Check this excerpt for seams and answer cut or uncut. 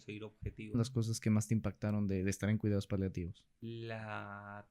cut